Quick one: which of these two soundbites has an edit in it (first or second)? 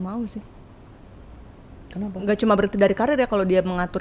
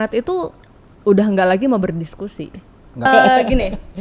second